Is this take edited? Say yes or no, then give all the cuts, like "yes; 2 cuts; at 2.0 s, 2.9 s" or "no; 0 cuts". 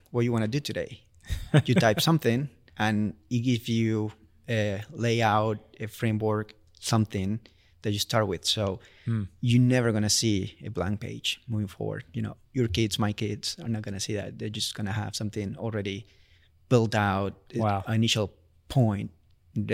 no; 0 cuts